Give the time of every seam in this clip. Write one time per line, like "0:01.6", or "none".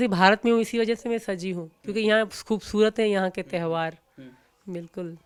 none

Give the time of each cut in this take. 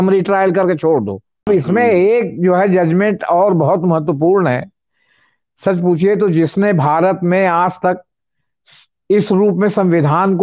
0:01.5

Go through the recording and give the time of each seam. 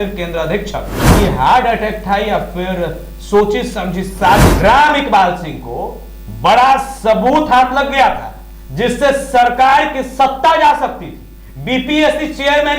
0:01.1
0:04.5

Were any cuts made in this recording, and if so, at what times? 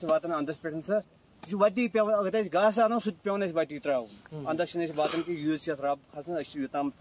none

